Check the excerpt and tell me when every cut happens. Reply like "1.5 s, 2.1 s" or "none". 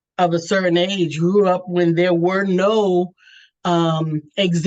none